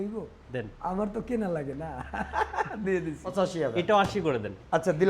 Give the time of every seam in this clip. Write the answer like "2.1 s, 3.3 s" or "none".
3.3 s